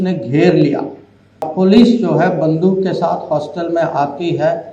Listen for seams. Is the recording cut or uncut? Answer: cut